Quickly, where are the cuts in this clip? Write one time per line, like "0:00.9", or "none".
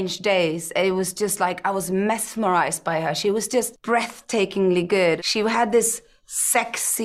0:03.8
0:05.2